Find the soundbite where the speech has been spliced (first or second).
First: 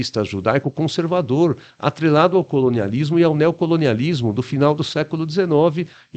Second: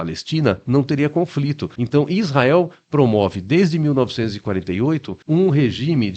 second